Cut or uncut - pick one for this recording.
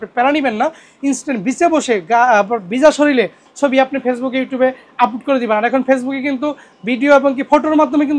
uncut